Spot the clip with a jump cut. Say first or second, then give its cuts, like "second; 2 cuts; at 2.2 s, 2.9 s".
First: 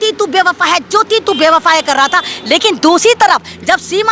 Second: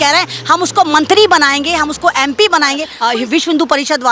second; 1 cut; at 2.9 s